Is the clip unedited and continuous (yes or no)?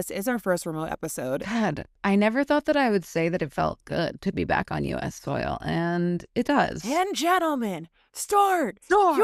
no